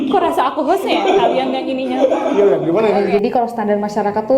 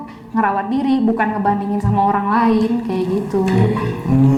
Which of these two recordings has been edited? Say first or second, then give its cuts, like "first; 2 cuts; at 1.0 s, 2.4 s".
first; 1 cut; at 3.0 s